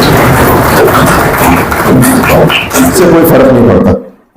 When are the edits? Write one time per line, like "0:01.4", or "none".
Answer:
0:03.0